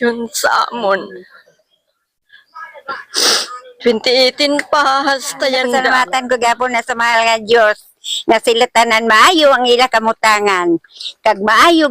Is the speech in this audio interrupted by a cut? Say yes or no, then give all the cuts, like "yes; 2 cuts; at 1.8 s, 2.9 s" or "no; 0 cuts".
yes; 1 cut; at 5.7 s